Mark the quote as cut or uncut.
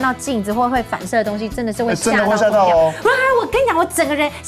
cut